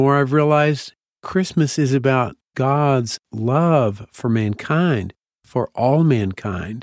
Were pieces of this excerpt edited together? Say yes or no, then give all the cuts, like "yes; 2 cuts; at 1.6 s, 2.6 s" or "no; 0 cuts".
no; 0 cuts